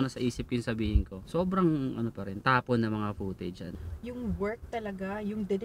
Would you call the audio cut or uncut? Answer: cut